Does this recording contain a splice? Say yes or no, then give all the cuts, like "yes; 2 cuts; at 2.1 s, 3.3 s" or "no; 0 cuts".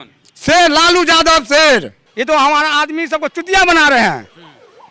yes; 1 cut; at 2.0 s